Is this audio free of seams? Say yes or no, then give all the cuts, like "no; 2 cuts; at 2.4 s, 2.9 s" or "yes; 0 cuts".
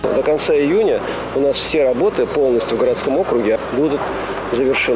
no; 1 cut; at 3.6 s